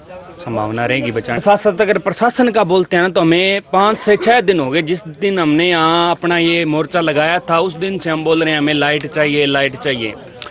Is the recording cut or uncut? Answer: cut